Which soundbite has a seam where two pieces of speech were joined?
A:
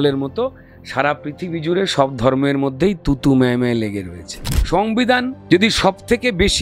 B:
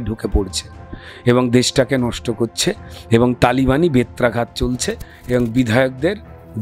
A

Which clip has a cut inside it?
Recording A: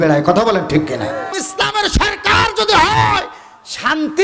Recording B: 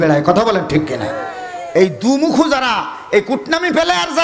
A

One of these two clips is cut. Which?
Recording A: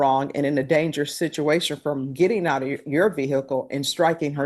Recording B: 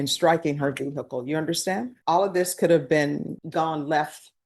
B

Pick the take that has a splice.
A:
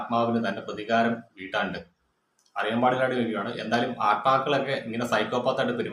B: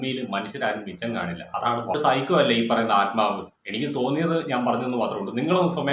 B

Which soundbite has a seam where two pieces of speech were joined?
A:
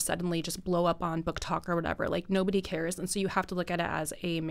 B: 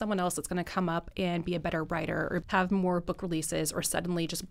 B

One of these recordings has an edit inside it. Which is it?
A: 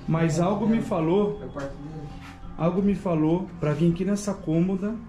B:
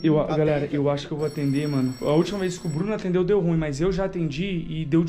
B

